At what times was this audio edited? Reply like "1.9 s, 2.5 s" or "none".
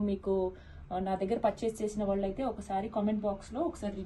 none